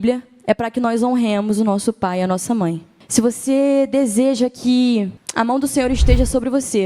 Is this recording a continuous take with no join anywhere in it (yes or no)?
no